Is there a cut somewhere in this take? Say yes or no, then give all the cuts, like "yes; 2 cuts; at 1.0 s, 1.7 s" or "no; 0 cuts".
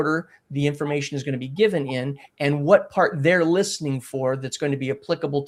no; 0 cuts